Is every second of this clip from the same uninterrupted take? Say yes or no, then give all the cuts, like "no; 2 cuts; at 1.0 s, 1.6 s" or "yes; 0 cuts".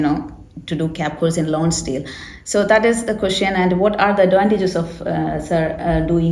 yes; 0 cuts